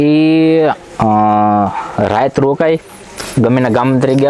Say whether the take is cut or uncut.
uncut